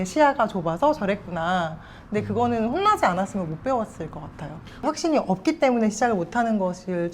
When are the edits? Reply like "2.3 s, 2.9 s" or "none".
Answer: 4.6 s